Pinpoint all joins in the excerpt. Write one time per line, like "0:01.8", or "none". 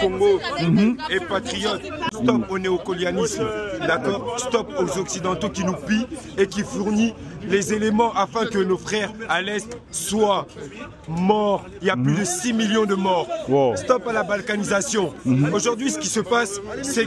0:02.0